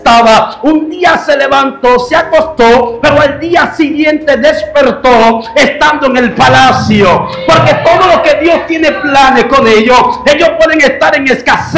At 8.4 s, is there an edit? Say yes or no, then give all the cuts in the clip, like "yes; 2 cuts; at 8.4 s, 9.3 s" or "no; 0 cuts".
no; 0 cuts